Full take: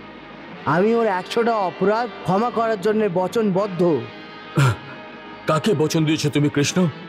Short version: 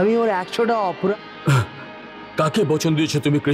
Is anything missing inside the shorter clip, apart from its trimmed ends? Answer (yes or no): yes